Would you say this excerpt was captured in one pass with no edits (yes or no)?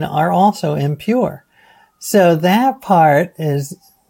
yes